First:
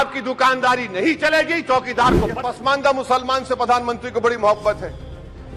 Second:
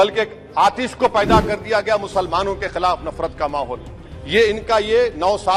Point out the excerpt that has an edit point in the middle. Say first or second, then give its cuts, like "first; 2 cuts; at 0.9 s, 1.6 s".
first; 1 cut; at 2.4 s